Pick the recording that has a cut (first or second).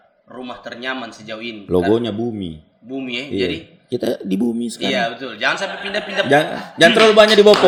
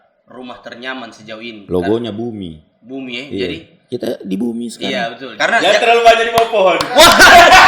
second